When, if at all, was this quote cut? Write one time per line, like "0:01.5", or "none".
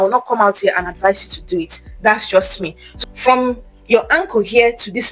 0:02.8